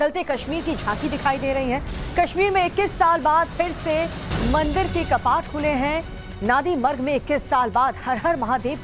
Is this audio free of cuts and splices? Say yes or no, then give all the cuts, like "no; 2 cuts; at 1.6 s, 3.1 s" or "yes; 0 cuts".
yes; 0 cuts